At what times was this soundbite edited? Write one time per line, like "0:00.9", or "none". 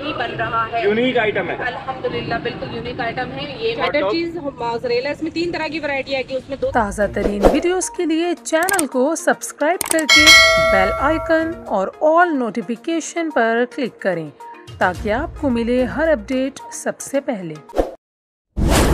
0:03.7
0:06.7